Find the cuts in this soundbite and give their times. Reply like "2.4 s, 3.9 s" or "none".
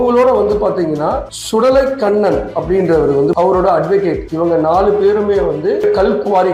3.3 s, 5.8 s